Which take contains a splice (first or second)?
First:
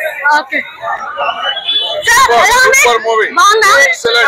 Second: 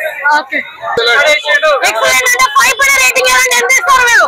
second